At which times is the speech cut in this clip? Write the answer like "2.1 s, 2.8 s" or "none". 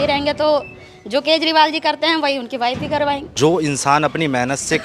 3.3 s